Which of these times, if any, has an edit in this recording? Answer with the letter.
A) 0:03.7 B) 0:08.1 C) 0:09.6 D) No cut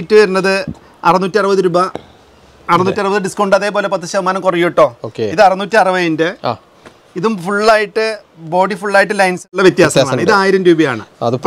C